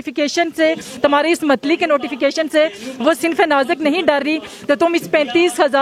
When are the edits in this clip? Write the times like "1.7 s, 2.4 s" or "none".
none